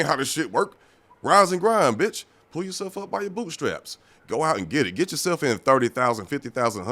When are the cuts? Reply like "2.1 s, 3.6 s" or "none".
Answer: none